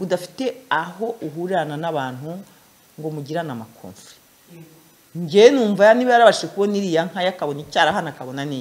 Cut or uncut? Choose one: uncut